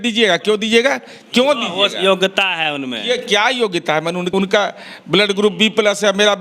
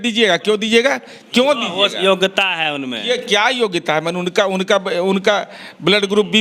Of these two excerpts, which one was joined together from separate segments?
first; 1 cut; at 4.3 s

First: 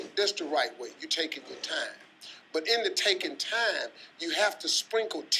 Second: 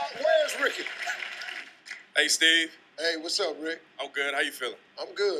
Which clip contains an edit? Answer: second; 1 cut; at 3.3 s

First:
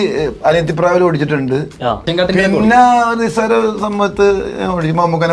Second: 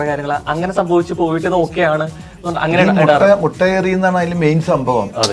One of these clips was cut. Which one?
first; 1 cut; at 2.0 s

